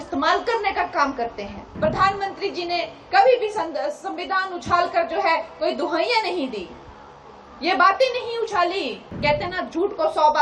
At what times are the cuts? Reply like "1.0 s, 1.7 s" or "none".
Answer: 1.6 s, 9.1 s